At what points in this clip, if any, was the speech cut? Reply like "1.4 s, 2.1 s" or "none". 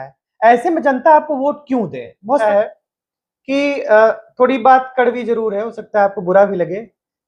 2.4 s